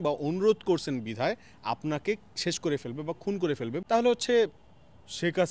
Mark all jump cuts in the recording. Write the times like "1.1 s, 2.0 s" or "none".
3.8 s